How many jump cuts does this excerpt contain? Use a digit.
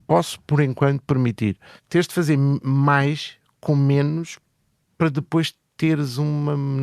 1